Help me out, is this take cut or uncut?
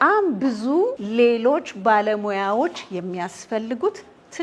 cut